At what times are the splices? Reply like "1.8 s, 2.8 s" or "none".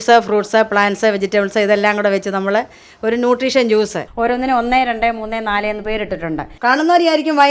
4.0 s, 6.5 s